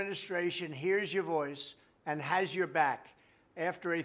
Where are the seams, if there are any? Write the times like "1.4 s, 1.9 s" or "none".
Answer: 1.1 s